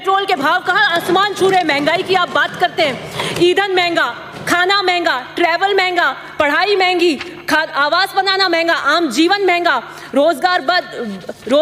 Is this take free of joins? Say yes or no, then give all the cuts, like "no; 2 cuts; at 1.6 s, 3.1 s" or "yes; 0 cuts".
yes; 0 cuts